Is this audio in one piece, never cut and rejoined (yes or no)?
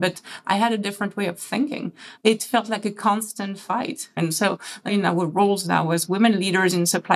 no